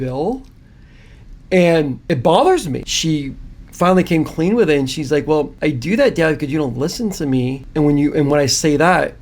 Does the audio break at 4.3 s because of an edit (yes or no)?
no